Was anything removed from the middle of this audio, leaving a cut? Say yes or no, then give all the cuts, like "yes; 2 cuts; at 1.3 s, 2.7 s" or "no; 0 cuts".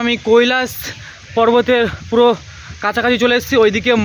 no; 0 cuts